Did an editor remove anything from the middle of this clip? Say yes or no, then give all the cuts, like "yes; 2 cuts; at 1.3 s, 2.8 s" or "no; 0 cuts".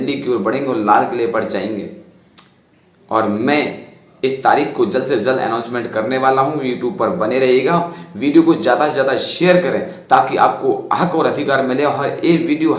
no; 0 cuts